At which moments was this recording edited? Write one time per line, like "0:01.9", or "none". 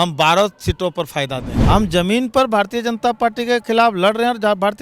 0:01.5